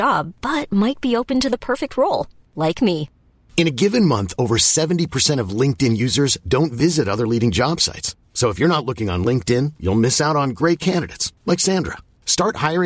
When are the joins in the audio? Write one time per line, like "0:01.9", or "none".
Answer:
none

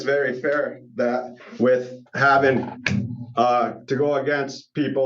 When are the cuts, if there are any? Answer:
none

